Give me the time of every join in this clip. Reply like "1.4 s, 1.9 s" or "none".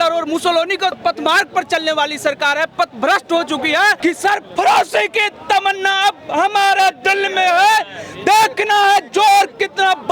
1.0 s, 4.0 s